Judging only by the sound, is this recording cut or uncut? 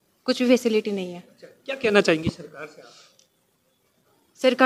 uncut